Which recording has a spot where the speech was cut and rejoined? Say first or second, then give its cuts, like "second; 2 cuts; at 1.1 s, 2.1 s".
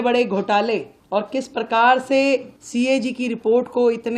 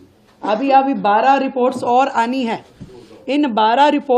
first; 2 cuts; at 0.9 s, 2.6 s